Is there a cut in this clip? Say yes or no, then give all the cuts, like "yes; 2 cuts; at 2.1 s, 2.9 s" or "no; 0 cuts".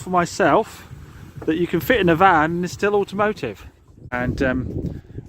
yes; 1 cut; at 4.1 s